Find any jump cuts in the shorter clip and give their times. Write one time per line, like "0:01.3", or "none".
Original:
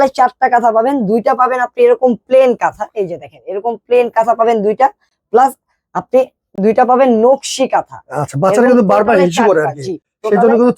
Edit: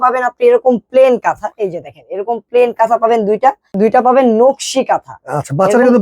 0:03.7